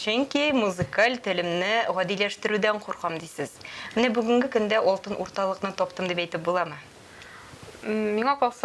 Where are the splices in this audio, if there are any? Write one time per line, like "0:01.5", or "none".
none